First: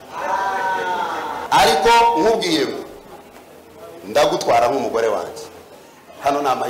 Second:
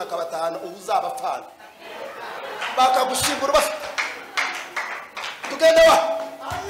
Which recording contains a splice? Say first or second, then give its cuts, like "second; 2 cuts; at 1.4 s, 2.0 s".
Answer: first; 1 cut; at 1.4 s